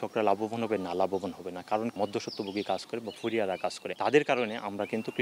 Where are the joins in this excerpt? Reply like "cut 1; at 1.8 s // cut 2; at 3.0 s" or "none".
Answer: cut 1; at 1.9 s // cut 2; at 3.9 s